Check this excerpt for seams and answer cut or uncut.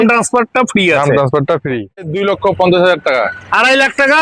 cut